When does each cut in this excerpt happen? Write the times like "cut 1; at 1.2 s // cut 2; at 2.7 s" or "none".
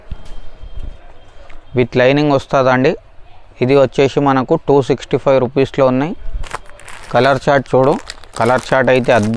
none